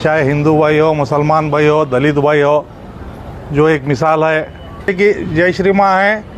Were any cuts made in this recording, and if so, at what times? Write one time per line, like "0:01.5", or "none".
0:04.9